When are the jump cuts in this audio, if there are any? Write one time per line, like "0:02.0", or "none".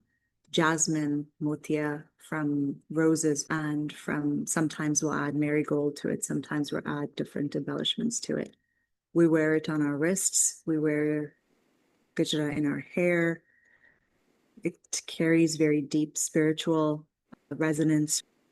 0:03.4